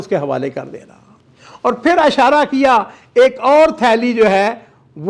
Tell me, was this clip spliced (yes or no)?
no